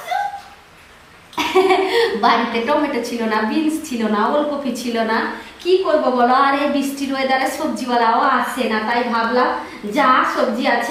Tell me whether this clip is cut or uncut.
uncut